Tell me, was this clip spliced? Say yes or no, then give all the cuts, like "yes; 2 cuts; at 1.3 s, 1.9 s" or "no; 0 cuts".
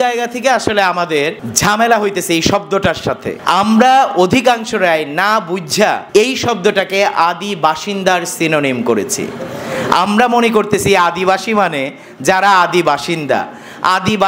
yes; 3 cuts; at 1.5 s, 3.3 s, 6.0 s